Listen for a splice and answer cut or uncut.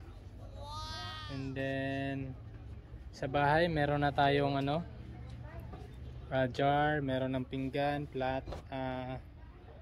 uncut